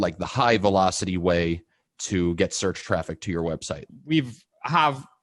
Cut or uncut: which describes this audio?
cut